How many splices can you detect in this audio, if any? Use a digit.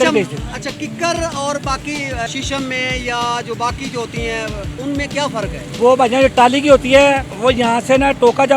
3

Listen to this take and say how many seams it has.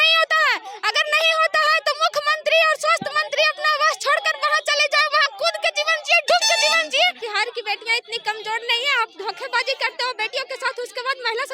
1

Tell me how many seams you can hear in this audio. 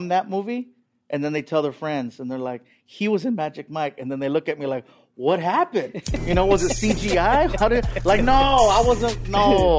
0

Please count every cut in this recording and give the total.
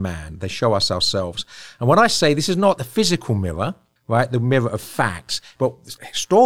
3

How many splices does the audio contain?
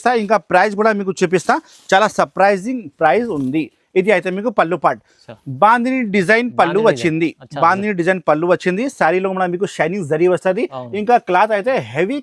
0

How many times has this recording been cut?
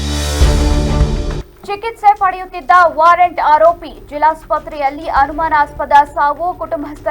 1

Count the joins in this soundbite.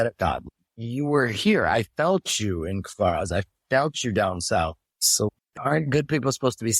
1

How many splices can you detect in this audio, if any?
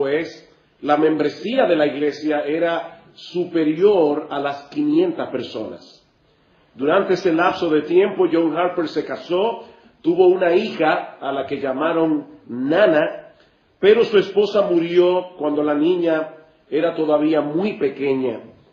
1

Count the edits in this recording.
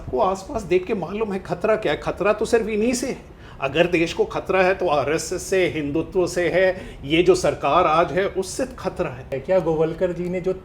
1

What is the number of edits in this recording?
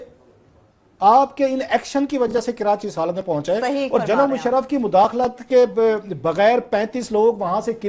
1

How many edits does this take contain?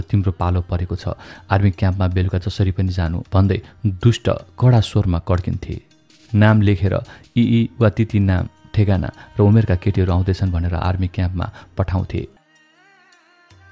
1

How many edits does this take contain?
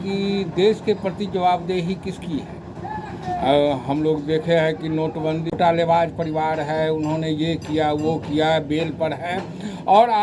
1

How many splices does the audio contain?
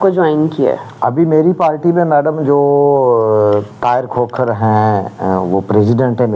0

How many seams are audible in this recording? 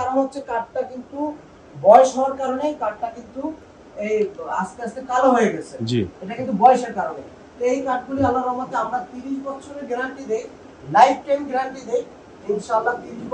0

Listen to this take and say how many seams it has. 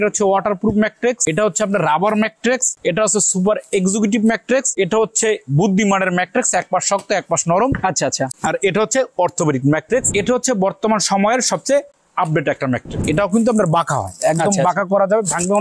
6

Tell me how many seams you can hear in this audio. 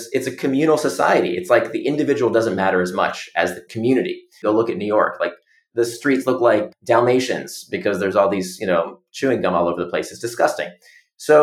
2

